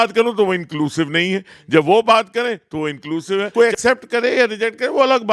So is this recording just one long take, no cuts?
no; 1 cut; at 3.5 s

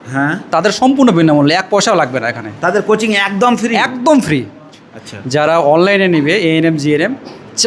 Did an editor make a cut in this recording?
yes; 1 cut; at 4.6 s

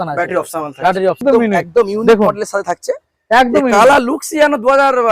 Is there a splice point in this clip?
yes; 1 cut; at 1.2 s

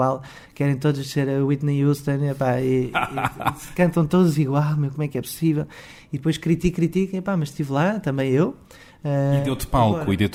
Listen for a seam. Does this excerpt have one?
no; 0 cuts

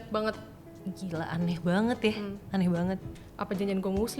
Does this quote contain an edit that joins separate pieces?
yes; 1 cut; at 3.1 s

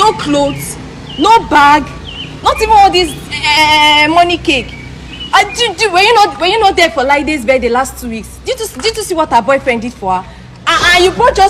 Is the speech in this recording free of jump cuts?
yes; 0 cuts

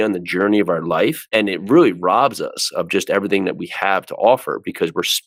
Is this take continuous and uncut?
yes; 0 cuts

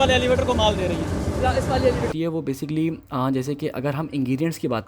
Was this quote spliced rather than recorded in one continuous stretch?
yes; 1 cut; at 2.1 s

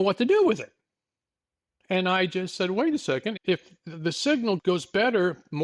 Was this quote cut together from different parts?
yes; 2 cuts; at 3.4 s, 4.6 s

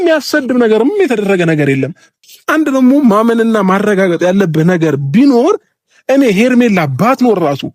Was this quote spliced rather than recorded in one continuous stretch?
yes; 1 cut; at 2.3 s

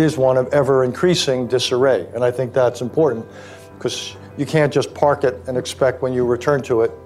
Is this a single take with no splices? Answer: yes; 0 cuts

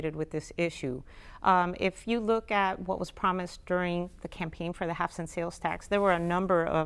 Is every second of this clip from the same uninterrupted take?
yes; 0 cuts

